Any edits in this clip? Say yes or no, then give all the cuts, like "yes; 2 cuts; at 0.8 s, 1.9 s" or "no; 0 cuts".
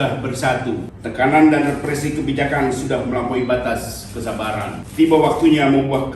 yes; 2 cuts; at 0.9 s, 4.8 s